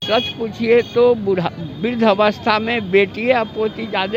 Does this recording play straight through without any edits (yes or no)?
yes